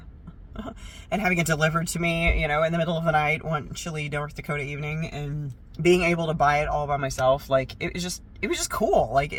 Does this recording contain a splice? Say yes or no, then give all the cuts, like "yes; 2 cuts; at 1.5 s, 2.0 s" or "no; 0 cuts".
no; 0 cuts